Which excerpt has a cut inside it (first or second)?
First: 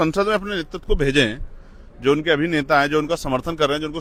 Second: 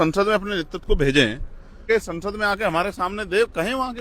second